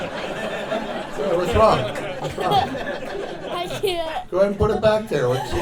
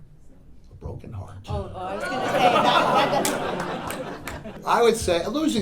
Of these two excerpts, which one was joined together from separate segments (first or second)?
second